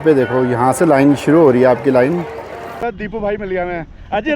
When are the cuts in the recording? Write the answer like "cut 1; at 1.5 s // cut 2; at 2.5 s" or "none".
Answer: cut 1; at 2.8 s